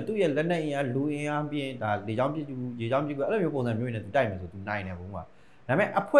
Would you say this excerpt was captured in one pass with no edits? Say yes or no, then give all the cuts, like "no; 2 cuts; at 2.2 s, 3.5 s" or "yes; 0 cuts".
yes; 0 cuts